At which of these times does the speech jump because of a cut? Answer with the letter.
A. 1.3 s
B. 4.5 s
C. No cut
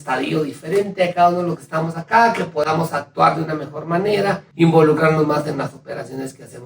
B